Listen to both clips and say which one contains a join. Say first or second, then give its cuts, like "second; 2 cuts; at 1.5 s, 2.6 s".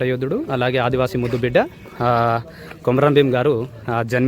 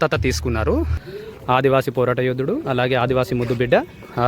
second; 1 cut; at 1.0 s